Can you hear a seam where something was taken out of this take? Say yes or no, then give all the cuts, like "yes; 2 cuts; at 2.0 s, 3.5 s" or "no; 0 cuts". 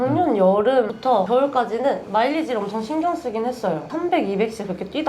yes; 2 cuts; at 1.1 s, 3.9 s